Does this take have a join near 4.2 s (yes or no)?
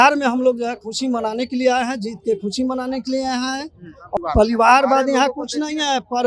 yes